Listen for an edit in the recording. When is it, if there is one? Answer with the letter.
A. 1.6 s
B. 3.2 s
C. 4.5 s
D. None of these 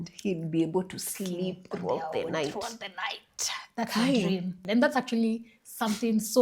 C